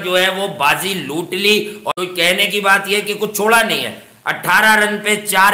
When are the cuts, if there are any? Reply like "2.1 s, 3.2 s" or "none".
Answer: 1.8 s